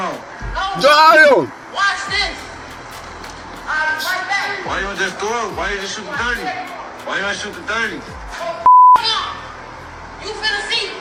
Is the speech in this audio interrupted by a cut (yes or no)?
no